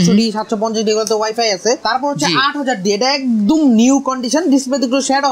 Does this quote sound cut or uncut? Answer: cut